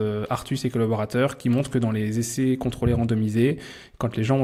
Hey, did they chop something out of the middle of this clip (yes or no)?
no